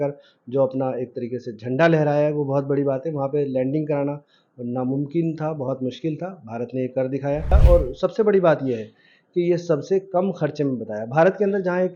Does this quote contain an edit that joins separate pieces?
yes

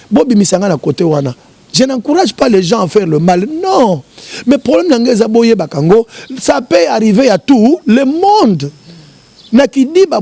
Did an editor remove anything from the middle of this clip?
no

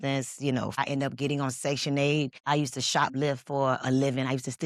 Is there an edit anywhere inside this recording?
yes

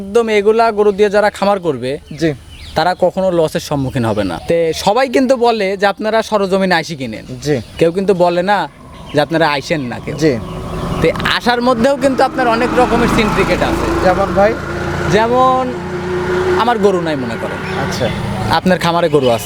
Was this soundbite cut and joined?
yes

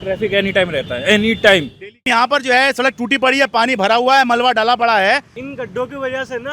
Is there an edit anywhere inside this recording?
yes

